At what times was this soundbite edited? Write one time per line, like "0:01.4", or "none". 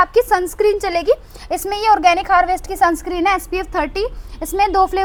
none